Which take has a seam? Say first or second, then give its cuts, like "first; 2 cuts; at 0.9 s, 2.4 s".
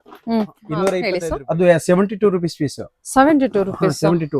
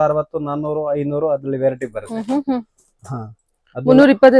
first; 1 cut; at 1.1 s